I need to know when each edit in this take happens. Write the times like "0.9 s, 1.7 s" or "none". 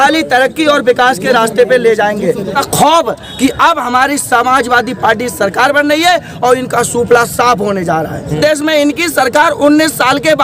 2.6 s, 8.4 s

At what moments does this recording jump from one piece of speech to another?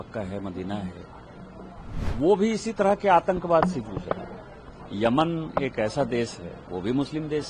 2.0 s

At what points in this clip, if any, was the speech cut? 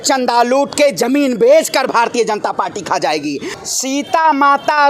3.5 s

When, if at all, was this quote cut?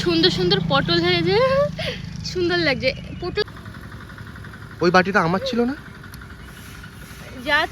3.4 s

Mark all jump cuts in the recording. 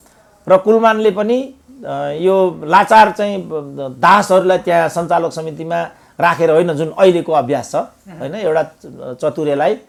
none

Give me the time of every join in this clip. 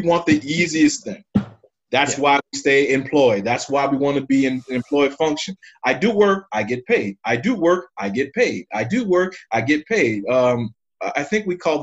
none

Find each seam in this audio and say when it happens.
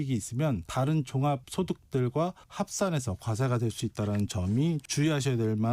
none

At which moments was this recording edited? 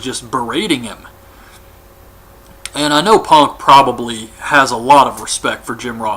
1.2 s

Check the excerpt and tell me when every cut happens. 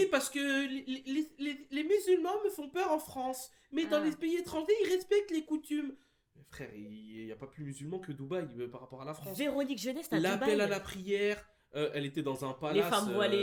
none

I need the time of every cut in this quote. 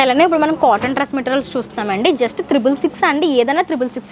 none

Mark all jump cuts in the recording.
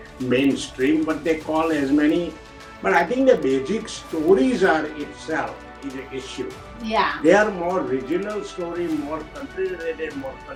none

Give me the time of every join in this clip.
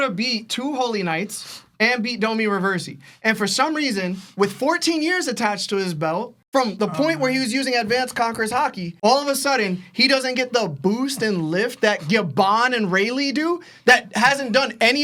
none

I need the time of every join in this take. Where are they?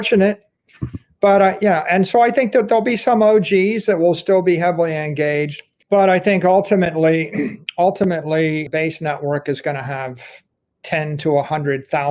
7.6 s, 8.7 s

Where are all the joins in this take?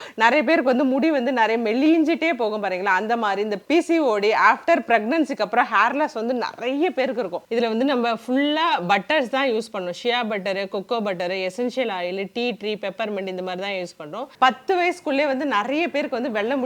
7.4 s, 14.2 s

